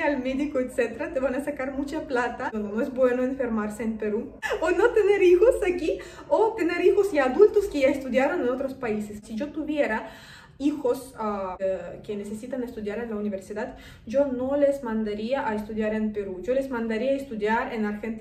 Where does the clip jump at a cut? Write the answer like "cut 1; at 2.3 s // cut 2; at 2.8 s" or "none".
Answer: cut 1; at 2.5 s // cut 2; at 4.4 s // cut 3; at 9.2 s // cut 4; at 11.5 s